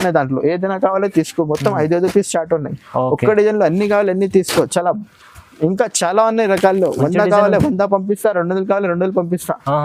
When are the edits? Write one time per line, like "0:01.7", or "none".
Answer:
none